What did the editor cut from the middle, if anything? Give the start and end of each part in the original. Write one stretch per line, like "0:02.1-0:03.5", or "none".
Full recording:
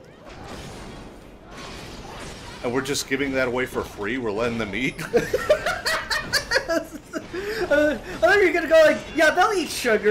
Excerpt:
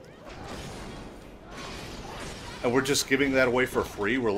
none

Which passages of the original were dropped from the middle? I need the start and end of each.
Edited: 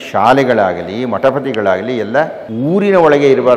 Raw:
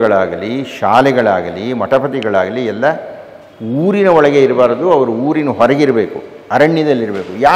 0:03.1-0:03.6

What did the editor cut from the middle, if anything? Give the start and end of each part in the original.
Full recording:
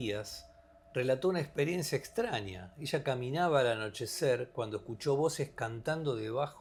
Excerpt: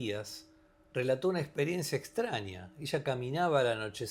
none

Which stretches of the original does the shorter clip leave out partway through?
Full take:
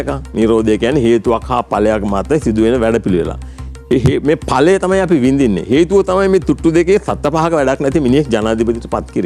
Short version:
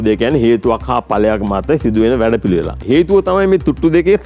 0:03.4-0:05.6

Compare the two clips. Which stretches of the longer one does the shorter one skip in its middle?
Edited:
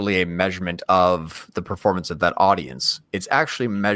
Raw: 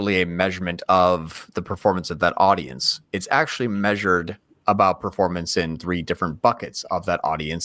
none

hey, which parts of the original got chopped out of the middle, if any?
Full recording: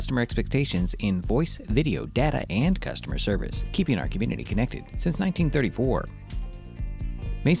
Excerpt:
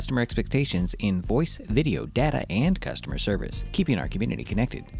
none

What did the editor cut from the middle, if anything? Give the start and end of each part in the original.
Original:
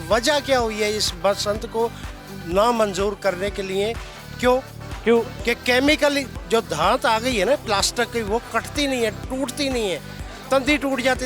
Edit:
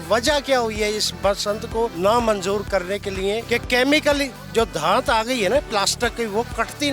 0:01.9-0:02.5
0:03.9-0:05.4

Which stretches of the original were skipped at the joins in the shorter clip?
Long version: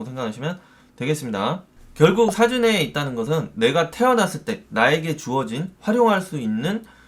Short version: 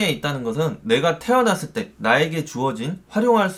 none

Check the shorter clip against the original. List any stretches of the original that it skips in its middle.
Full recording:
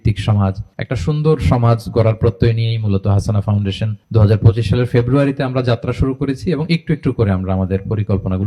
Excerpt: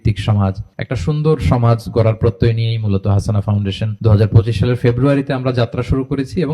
0:03.9-0:04.0

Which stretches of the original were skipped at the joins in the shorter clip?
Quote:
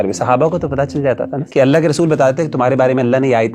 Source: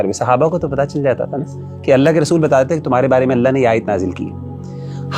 0:01.4-0:01.7

